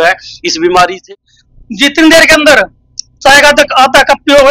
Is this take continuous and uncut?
no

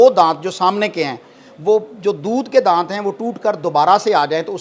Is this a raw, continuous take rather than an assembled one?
yes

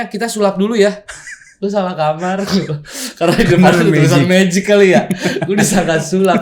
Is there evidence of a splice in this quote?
no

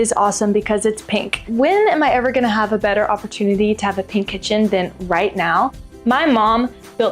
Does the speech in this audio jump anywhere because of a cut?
yes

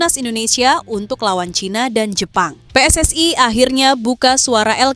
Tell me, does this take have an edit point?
yes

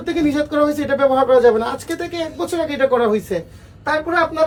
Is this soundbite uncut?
yes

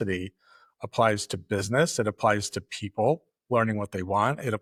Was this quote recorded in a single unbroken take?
yes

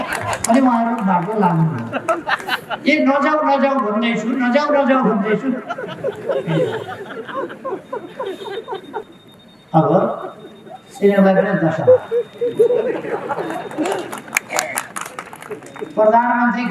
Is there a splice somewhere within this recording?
yes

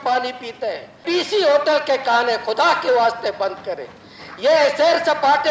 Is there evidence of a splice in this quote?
yes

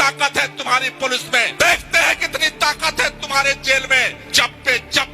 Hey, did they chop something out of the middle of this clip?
yes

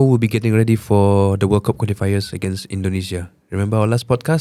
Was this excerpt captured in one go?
yes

